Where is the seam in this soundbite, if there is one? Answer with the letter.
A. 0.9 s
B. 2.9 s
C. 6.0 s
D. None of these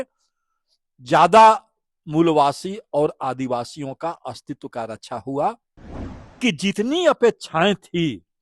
C